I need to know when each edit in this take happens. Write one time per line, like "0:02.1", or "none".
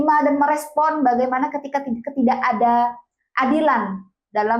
none